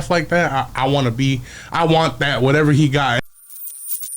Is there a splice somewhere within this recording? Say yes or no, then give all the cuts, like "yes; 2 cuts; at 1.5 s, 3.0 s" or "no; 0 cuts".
yes; 1 cut; at 3.2 s